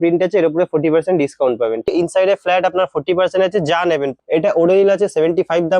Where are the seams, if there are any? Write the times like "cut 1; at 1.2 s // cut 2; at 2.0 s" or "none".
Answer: cut 1; at 1.9 s // cut 2; at 4.2 s

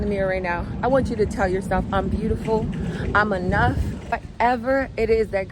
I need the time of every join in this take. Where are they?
cut 1; at 4.3 s

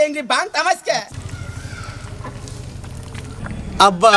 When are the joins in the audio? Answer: cut 1; at 1.1 s

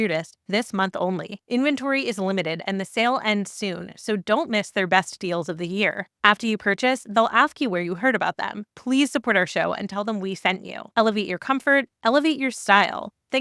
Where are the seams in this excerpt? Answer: none

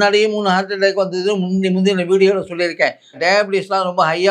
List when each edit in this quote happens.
cut 1; at 3.2 s

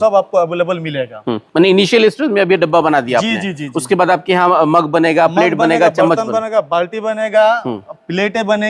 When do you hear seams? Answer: none

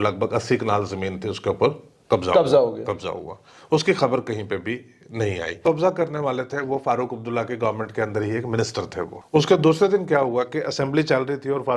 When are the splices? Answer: cut 1; at 5.6 s // cut 2; at 9.2 s

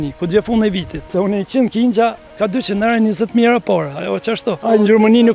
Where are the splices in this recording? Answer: cut 1; at 1.0 s // cut 2; at 4.6 s

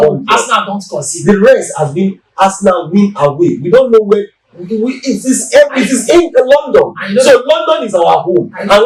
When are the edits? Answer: none

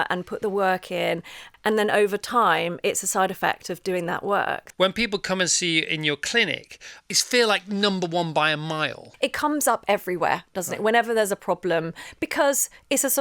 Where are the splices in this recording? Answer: cut 1; at 1.4 s // cut 2; at 4.6 s // cut 3; at 7.0 s // cut 4; at 9.1 s

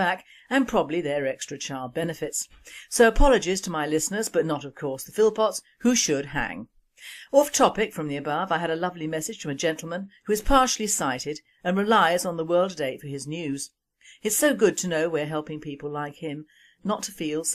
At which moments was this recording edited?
cut 1; at 7.5 s

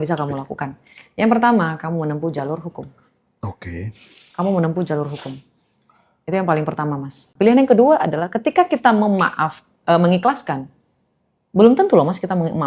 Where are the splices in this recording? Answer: cut 1; at 7.2 s

